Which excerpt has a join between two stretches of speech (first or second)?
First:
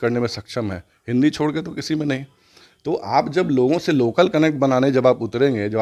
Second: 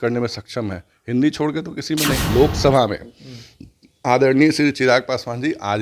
second